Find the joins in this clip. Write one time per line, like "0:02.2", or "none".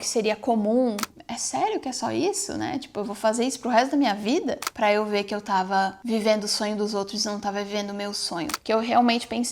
0:01.0
0:04.7
0:08.6